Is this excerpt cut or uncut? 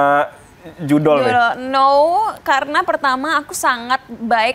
uncut